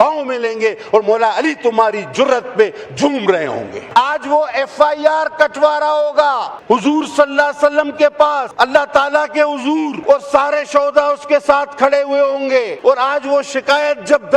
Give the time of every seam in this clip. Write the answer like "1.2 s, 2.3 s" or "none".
3.8 s, 6.5 s, 8.5 s, 10.0 s, 12.7 s